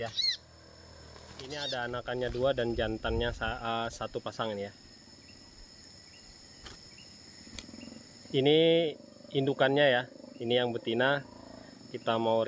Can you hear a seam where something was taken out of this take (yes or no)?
yes